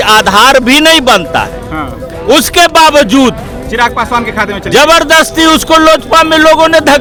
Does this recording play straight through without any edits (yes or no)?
yes